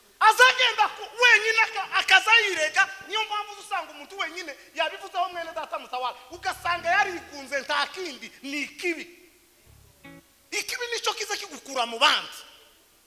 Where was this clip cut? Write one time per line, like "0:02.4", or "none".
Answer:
none